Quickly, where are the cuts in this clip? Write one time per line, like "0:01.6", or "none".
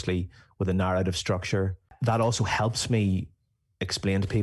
0:01.9